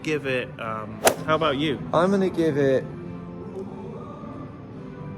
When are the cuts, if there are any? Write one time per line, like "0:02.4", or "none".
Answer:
0:01.2